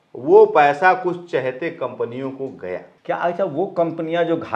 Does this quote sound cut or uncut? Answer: cut